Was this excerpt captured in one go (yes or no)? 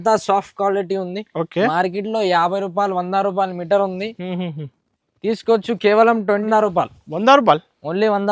no